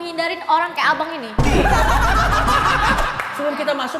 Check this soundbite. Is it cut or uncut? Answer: cut